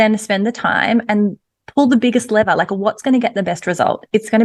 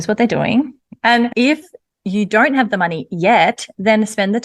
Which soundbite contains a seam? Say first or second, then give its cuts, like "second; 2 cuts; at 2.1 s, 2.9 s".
second; 1 cut; at 1.1 s